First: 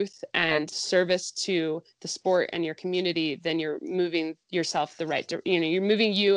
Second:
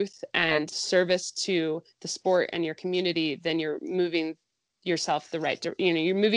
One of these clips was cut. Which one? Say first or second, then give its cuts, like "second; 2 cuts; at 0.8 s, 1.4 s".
first; 1 cut; at 4.4 s